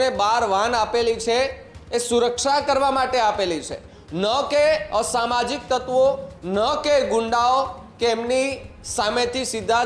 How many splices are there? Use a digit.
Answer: 0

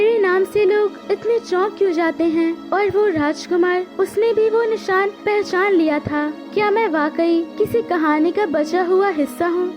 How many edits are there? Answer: 6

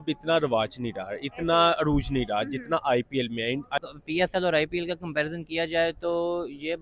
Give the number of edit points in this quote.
1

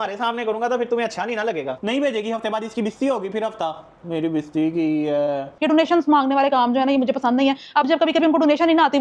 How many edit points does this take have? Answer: 2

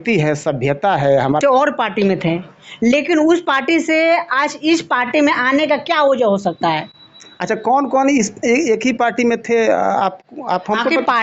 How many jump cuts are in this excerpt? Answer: 1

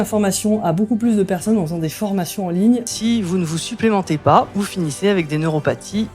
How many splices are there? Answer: 2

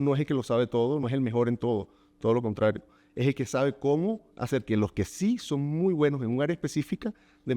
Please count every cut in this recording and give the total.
1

